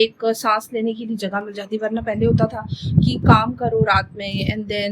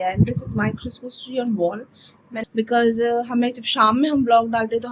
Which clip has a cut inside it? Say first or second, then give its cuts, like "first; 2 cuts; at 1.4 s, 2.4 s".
second; 1 cut; at 2.2 s